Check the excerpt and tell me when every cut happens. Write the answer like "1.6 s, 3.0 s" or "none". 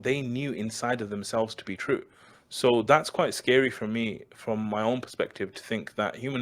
none